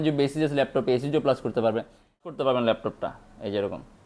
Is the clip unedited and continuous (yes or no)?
no